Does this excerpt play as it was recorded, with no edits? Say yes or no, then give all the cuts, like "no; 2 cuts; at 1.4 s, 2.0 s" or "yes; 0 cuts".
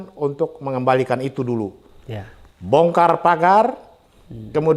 yes; 0 cuts